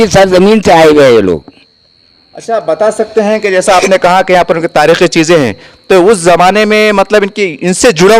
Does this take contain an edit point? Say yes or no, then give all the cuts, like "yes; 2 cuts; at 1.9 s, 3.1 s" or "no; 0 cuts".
no; 0 cuts